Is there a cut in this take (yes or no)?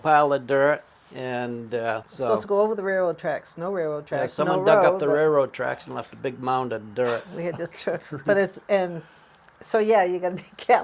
yes